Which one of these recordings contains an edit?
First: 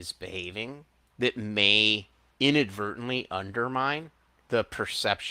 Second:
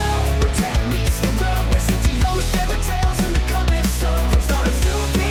first; 3 cuts; at 1.0 s, 2.2 s, 4.3 s

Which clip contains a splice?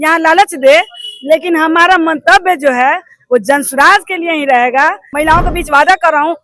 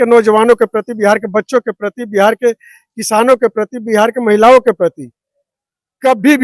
first; 1 cut; at 5.0 s

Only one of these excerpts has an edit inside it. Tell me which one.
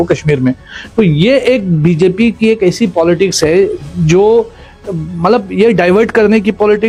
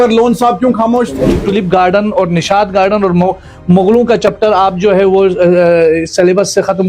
second; 1 cut; at 1.4 s

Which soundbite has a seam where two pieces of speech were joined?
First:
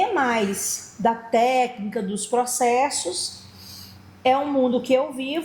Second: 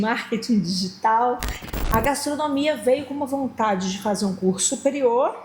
second; 1 cut; at 1.7 s

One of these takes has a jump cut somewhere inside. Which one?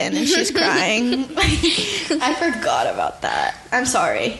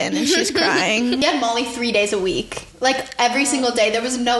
second; 1 cut; at 1.2 s

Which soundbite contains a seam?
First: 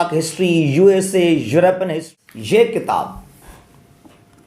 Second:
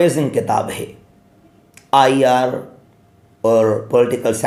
first; 1 cut; at 2.0 s

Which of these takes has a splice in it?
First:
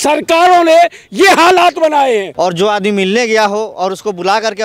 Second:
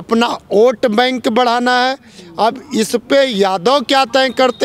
first; 1 cut; at 2.3 s

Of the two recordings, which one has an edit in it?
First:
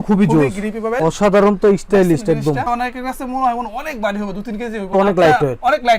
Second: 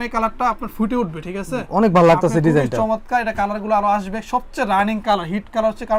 first; 1 cut; at 1.0 s

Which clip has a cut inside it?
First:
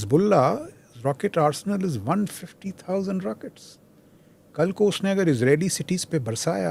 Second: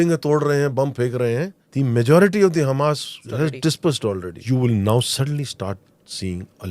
second; 3 cuts; at 1.6 s, 3.2 s, 4.3 s

